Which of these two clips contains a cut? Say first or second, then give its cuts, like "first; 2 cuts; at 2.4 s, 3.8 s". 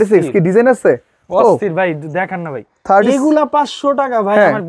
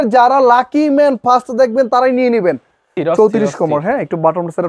second; 1 cut; at 3.0 s